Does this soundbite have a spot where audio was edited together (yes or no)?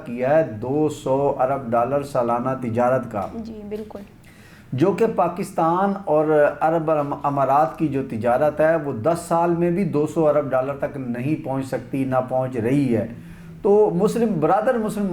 no